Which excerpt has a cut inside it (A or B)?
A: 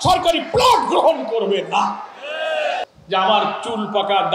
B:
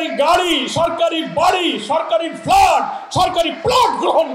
A